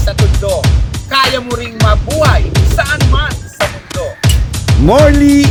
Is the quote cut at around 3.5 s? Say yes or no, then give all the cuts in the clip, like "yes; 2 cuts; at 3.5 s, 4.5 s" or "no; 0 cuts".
no; 0 cuts